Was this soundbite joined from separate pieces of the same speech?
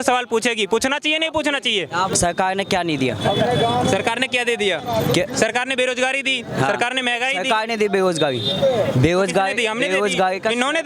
yes; 1 cut; at 2.1 s

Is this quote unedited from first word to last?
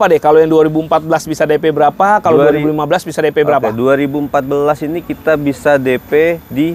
yes; 0 cuts

